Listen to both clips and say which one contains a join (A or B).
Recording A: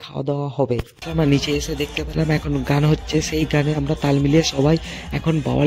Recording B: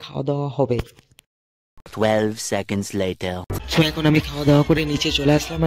A